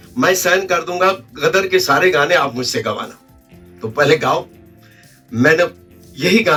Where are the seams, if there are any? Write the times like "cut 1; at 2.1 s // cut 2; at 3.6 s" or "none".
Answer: none